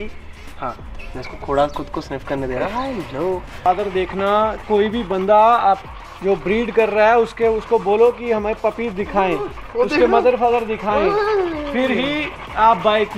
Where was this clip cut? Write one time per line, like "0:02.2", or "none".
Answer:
0:03.7

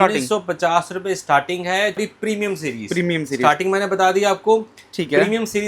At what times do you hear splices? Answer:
0:02.0

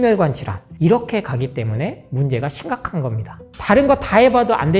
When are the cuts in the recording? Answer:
0:03.5

